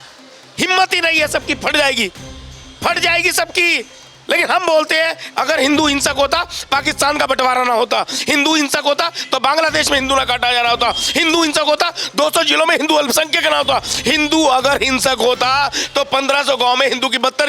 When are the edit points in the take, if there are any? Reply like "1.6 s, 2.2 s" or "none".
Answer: 5.2 s